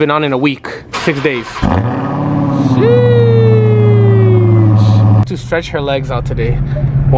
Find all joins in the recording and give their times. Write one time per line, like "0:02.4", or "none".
0:05.3